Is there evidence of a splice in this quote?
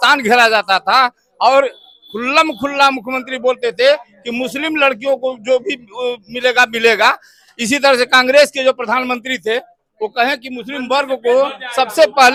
no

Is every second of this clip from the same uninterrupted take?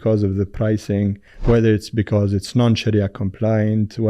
no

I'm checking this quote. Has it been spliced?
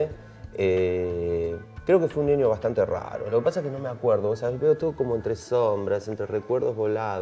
yes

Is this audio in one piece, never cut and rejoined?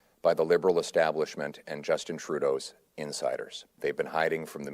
no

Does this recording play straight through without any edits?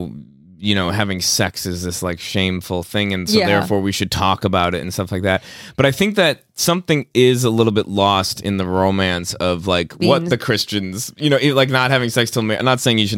yes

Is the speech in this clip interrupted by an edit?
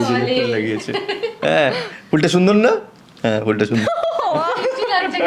no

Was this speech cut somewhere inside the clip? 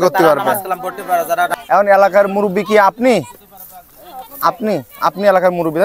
yes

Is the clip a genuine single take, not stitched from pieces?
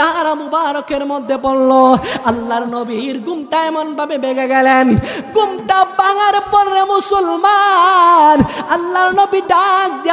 yes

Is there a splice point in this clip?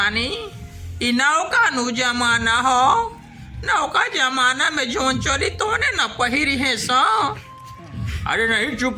no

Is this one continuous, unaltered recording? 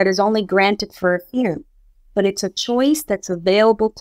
yes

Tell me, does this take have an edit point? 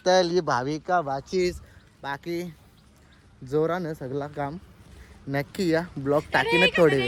no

